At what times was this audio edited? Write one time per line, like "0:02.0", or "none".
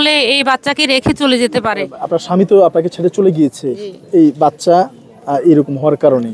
0:01.9